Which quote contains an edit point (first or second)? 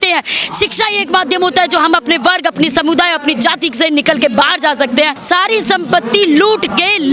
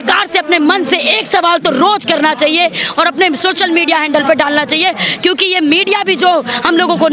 first